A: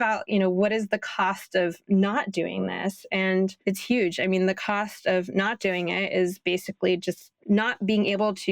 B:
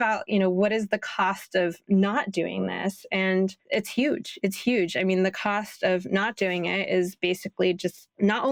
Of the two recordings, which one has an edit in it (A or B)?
A